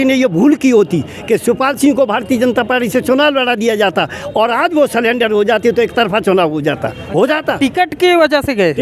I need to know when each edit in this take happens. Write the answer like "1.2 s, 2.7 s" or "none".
none